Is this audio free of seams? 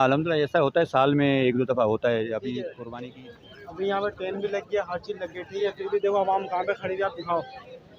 no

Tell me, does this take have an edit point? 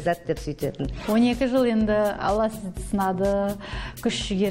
yes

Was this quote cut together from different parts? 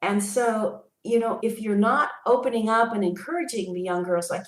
yes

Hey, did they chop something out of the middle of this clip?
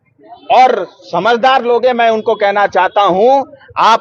no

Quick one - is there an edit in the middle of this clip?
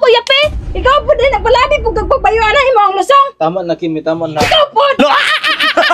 yes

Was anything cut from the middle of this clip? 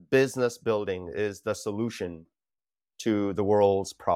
no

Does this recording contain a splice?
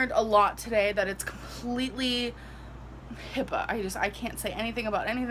no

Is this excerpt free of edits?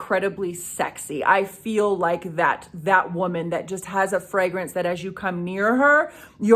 yes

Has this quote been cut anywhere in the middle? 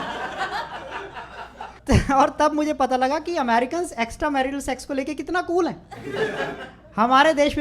yes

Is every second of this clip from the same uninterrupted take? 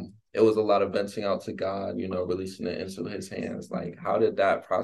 yes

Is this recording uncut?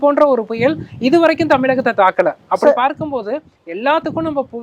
yes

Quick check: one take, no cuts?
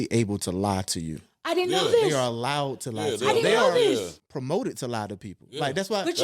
no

